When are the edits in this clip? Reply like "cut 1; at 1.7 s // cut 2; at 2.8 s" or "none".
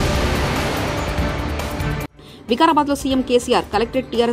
cut 1; at 2.1 s